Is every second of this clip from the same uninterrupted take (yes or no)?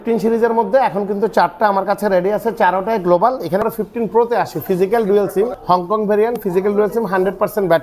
no